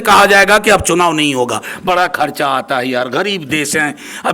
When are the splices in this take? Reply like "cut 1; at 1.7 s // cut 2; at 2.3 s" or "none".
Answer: none